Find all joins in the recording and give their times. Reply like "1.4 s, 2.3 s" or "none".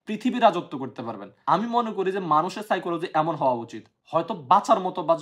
1.3 s